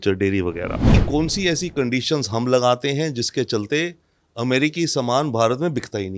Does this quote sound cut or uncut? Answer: cut